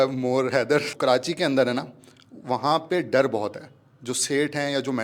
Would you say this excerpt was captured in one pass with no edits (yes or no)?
no